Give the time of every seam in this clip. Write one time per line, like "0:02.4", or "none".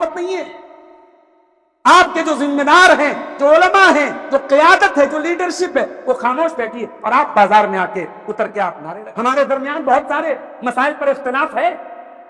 0:08.9